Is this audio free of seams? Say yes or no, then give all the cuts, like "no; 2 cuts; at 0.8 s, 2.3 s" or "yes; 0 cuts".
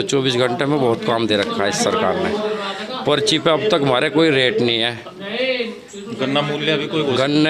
yes; 0 cuts